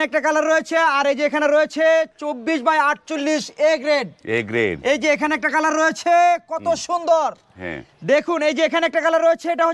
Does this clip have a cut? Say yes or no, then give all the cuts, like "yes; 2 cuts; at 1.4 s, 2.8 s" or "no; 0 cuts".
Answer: no; 0 cuts